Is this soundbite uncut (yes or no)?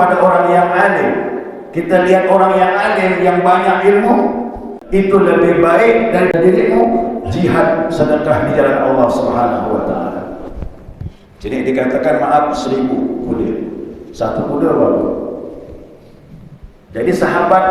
no